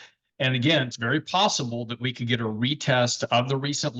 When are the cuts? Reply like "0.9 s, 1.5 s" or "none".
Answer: 0.9 s